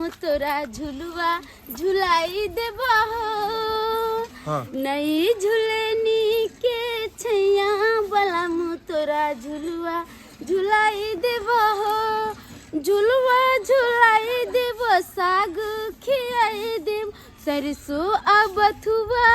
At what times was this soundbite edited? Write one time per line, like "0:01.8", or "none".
none